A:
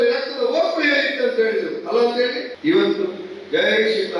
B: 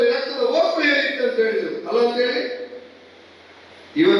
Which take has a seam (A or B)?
A